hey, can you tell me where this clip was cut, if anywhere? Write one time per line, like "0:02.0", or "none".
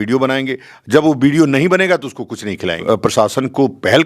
0:02.8